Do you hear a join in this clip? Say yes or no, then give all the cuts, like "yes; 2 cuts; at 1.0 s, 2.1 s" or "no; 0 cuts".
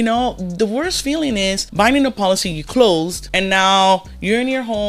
yes; 2 cuts; at 1.6 s, 3.2 s